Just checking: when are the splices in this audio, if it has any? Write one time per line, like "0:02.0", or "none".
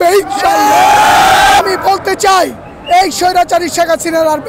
0:01.6